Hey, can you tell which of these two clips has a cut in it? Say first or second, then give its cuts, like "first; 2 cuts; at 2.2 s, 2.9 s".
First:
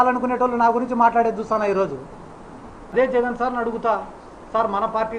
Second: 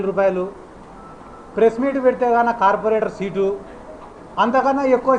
first; 1 cut; at 2.9 s